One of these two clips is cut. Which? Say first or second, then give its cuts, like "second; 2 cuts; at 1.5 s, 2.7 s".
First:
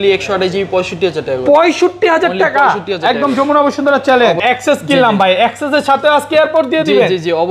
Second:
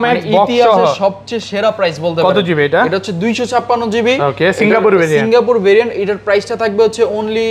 first; 1 cut; at 4.4 s